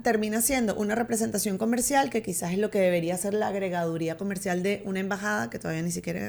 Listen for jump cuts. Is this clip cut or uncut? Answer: uncut